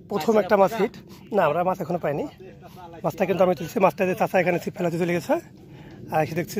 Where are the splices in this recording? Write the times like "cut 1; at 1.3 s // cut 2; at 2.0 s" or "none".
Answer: none